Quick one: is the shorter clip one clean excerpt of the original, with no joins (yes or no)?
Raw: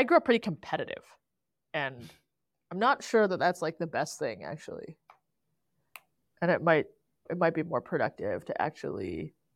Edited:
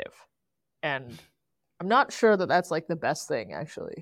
yes